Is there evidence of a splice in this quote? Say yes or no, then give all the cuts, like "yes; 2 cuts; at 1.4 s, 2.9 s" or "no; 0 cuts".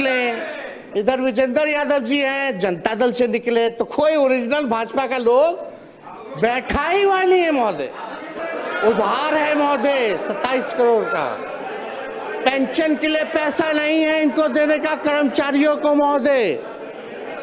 yes; 1 cut; at 8.4 s